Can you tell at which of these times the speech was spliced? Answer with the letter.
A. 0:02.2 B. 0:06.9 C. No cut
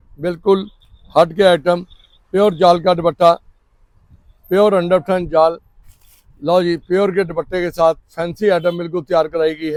C